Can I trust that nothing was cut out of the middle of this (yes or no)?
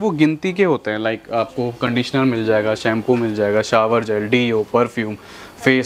yes